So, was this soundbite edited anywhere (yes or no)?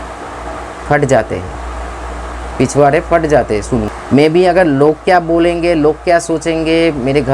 yes